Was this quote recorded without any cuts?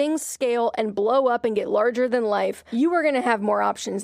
no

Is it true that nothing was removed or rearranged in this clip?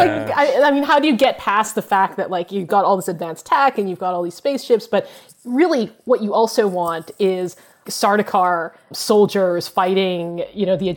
no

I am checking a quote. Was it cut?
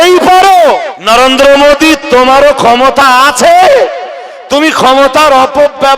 yes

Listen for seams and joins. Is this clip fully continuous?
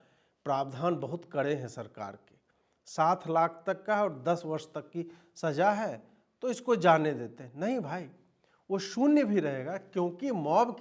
yes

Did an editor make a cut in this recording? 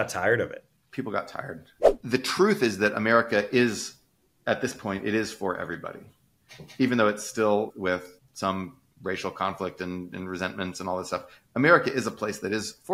yes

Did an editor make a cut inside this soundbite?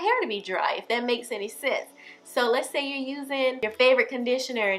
yes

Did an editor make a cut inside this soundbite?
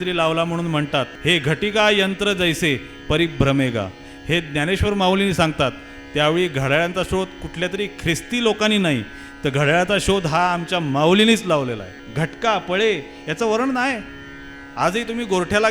yes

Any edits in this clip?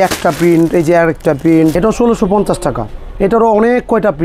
yes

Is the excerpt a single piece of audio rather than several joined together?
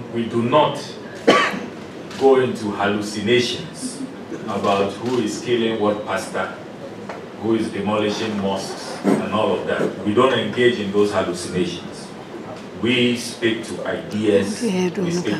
yes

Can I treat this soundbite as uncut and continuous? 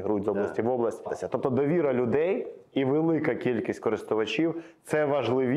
no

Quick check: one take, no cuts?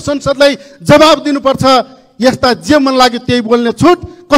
yes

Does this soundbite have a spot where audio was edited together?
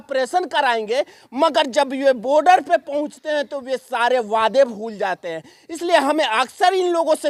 no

